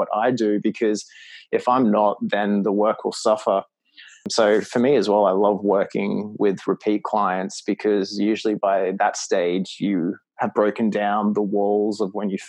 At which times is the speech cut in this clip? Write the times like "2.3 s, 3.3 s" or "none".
4.3 s